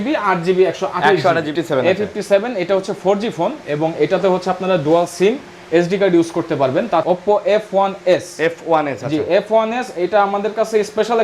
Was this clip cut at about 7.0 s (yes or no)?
yes